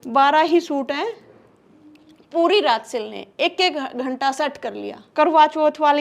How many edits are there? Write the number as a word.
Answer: one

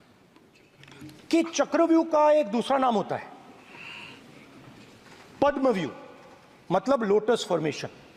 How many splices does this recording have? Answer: zero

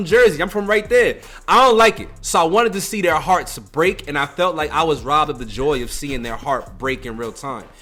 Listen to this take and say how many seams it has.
zero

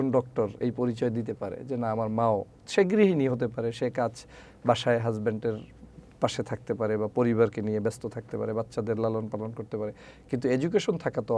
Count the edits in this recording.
zero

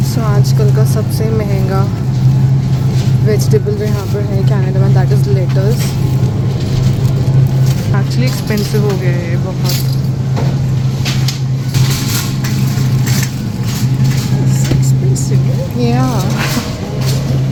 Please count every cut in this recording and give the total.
zero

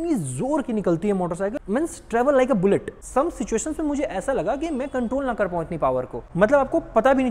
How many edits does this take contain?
three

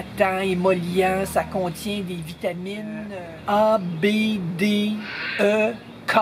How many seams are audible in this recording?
one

